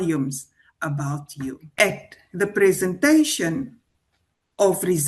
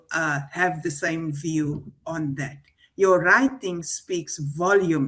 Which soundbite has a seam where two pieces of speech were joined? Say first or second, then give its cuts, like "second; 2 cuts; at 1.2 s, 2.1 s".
first; 1 cut; at 1.8 s